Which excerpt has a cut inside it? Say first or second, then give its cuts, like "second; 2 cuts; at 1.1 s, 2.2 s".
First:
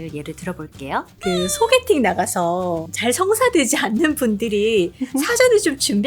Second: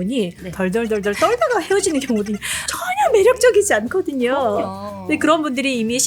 first; 2 cuts; at 1.1 s, 2.9 s